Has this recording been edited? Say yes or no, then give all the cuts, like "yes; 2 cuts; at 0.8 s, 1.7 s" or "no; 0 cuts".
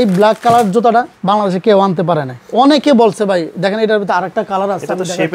no; 0 cuts